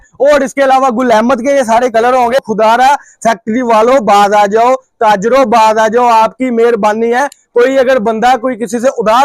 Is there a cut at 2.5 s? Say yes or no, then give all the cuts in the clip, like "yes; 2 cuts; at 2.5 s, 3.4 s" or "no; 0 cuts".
yes; 1 cut; at 2.5 s